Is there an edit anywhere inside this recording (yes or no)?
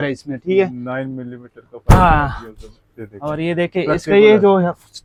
no